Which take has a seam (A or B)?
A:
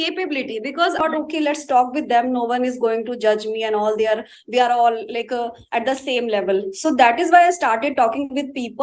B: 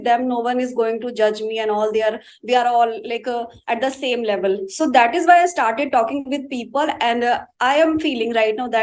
A